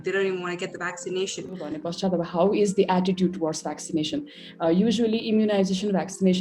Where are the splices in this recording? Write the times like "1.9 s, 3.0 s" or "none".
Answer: 1.8 s